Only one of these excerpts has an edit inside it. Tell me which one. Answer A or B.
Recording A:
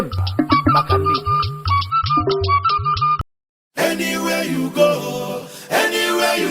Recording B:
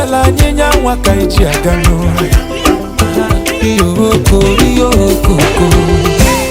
A